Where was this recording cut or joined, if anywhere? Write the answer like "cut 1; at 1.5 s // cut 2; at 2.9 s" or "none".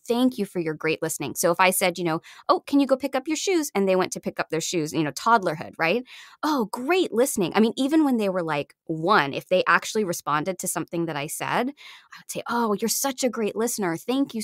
none